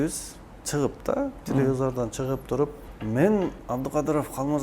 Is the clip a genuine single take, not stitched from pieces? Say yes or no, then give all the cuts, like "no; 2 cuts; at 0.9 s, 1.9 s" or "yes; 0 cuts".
no; 2 cuts; at 2.9 s, 3.6 s